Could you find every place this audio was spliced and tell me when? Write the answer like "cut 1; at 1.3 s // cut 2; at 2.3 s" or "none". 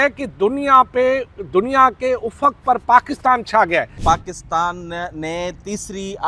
cut 1; at 3.9 s